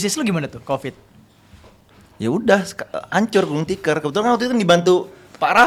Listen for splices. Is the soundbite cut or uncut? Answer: uncut